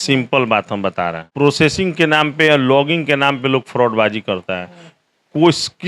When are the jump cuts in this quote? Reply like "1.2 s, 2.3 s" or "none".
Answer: 1.2 s